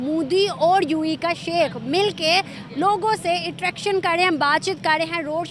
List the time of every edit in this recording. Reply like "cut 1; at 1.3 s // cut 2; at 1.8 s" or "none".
none